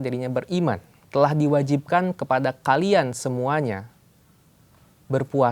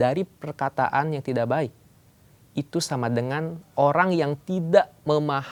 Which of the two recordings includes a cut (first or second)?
first